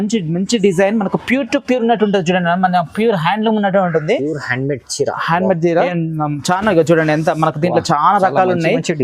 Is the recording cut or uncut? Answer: cut